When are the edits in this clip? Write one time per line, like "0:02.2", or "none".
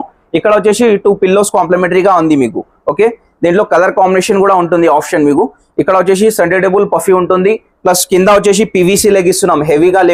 none